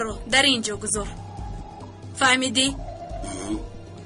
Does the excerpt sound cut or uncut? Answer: uncut